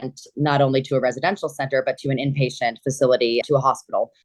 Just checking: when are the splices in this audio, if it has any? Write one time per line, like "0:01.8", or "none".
none